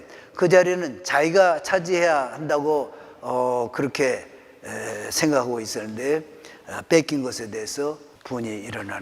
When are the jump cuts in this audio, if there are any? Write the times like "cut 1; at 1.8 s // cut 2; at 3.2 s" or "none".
cut 1; at 8.1 s